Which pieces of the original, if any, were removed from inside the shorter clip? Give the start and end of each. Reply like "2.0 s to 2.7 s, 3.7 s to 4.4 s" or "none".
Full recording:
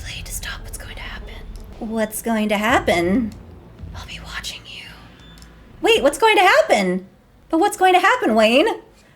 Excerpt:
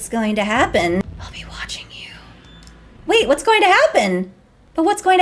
3.1 s to 3.8 s